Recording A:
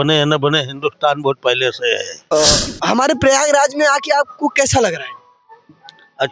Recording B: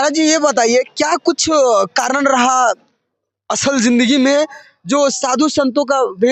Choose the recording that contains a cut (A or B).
A